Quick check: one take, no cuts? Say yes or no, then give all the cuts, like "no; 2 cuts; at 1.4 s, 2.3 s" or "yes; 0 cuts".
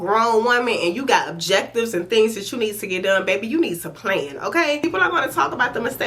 no; 1 cut; at 4.8 s